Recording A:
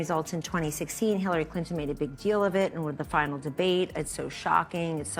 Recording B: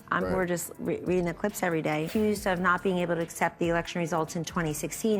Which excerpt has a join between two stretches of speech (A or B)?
B